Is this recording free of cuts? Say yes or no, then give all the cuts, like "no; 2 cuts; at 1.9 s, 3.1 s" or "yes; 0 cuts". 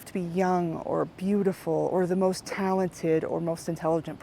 yes; 0 cuts